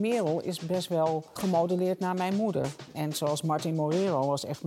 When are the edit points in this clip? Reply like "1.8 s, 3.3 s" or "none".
1.4 s, 2.9 s